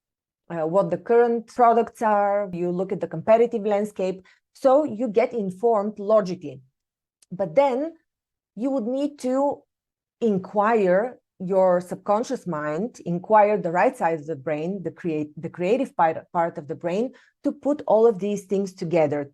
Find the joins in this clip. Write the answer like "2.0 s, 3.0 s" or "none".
1.5 s, 2.5 s